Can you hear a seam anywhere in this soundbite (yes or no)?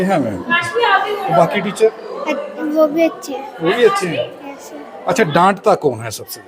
no